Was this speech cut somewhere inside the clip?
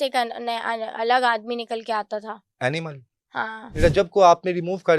yes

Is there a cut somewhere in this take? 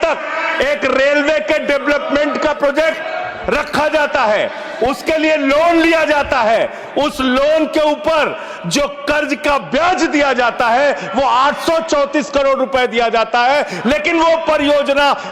no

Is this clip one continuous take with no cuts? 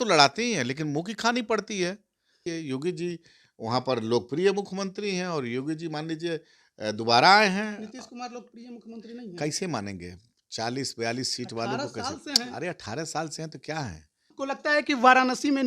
no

